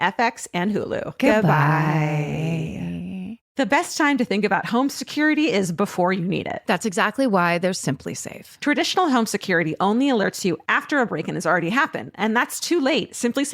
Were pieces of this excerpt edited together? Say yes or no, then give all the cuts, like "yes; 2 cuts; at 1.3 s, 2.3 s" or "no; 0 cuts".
yes; 1 cut; at 3.4 s